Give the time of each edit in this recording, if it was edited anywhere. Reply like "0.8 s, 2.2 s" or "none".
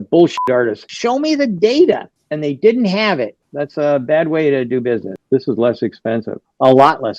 0.9 s, 3.4 s, 5.2 s